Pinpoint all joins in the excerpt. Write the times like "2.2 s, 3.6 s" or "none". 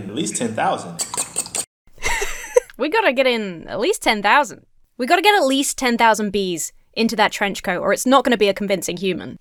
none